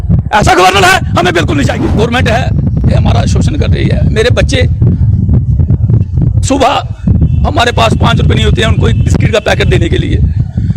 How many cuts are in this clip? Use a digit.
1